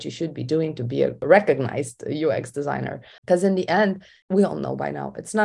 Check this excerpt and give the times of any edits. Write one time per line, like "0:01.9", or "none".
0:03.1